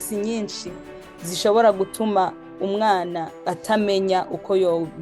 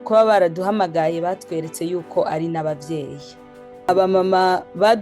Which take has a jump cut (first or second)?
second